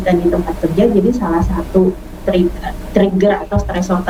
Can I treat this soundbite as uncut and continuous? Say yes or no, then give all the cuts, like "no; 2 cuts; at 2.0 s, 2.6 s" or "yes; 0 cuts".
yes; 0 cuts